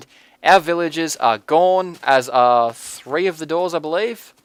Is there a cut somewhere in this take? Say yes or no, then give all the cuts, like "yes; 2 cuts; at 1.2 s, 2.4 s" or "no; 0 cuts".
no; 0 cuts